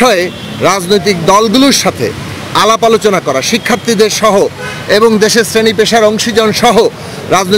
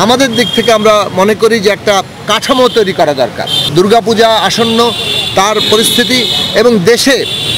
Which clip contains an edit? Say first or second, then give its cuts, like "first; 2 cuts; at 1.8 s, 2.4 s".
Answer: second; 1 cut; at 3.6 s